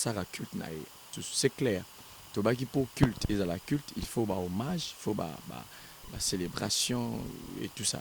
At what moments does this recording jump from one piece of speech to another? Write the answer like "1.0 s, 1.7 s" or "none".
1.2 s